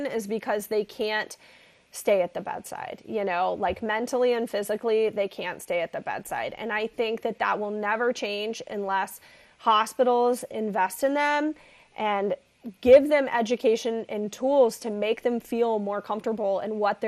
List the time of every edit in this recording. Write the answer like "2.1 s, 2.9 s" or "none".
none